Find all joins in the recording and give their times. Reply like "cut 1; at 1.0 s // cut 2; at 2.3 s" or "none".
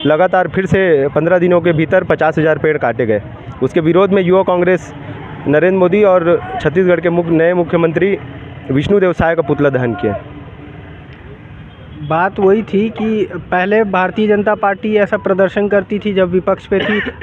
none